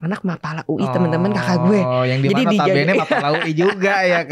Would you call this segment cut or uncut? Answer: uncut